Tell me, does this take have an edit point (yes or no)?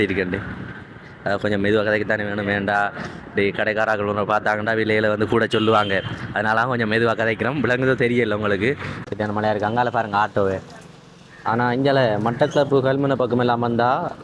yes